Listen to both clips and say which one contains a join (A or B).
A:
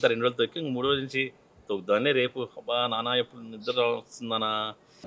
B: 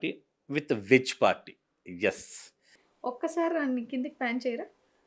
B